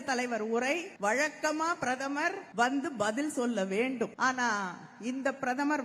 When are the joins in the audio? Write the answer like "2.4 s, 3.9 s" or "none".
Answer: 0.9 s, 2.4 s, 4.1 s

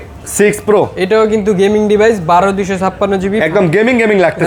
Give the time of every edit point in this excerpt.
none

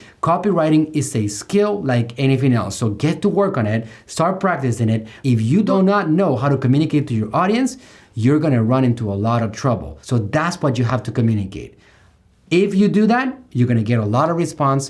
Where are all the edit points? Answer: 5.6 s, 9.9 s

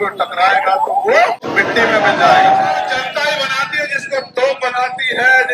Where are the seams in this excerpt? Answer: 1.5 s, 2.8 s

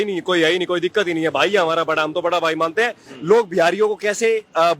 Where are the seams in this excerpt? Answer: 3.1 s

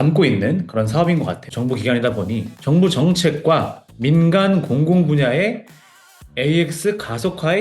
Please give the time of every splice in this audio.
1.5 s

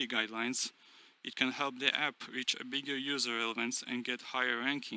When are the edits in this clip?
none

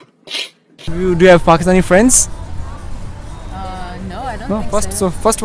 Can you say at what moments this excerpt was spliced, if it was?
0.9 s

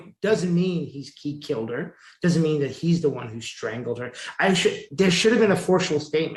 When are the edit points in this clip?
none

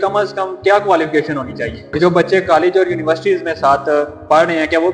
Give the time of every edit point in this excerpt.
2.0 s

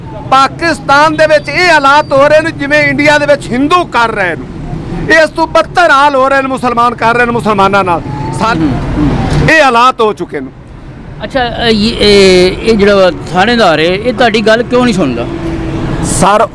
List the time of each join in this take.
8.5 s

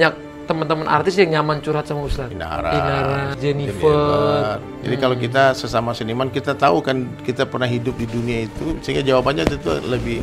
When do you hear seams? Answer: 2.3 s, 3.3 s, 4.7 s

